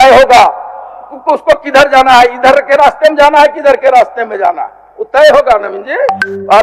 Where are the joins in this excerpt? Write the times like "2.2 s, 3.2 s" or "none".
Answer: none